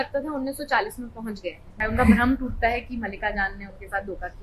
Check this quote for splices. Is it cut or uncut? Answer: cut